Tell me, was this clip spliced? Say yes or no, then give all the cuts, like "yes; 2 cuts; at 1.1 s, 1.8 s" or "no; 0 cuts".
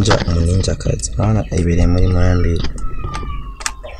no; 0 cuts